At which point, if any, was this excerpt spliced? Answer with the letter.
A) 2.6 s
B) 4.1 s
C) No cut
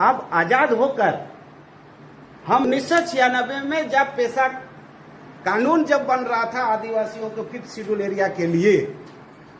A